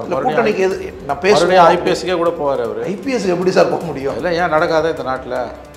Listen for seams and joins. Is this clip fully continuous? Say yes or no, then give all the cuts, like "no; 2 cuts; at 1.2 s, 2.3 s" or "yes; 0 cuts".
yes; 0 cuts